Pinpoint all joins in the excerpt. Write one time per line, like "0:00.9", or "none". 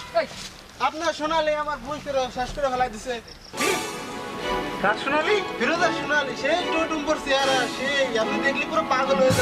0:03.5